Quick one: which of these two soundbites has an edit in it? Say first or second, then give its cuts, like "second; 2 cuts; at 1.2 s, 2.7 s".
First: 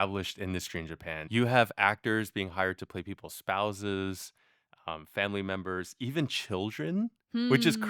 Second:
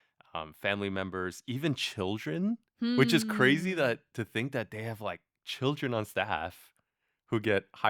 first; 1 cut; at 1.3 s